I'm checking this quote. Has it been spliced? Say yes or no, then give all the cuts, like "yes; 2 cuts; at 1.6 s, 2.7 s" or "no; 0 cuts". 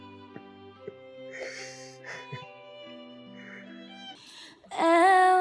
yes; 1 cut; at 4.2 s